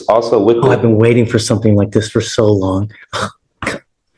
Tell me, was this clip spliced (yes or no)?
no